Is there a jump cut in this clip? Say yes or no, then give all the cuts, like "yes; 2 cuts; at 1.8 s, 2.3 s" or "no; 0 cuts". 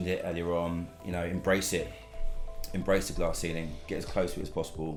no; 0 cuts